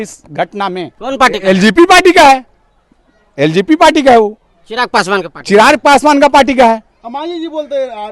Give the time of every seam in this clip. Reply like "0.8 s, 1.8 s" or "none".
7.0 s